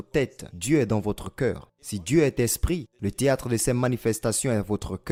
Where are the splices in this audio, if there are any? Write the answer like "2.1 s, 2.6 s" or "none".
none